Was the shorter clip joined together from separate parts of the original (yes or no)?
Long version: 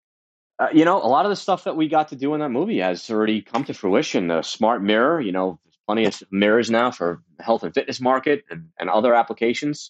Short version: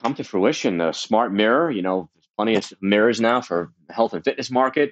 no